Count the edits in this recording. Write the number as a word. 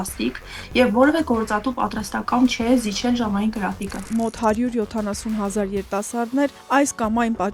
one